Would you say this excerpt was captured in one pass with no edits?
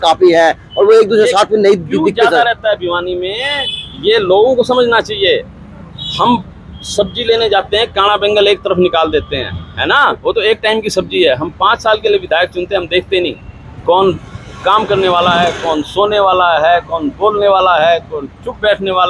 yes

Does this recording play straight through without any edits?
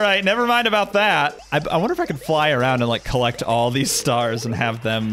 no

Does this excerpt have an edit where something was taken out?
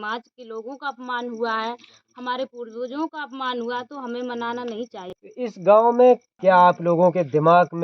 no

